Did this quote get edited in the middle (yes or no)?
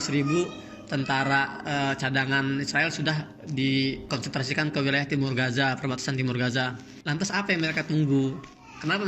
no